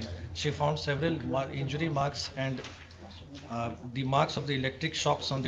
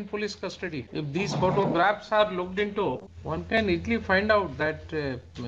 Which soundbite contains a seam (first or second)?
second